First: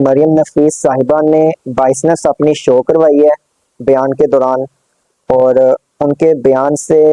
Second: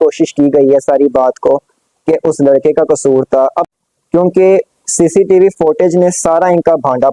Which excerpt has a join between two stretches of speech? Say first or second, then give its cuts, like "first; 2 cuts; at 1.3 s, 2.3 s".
second; 1 cut; at 3.7 s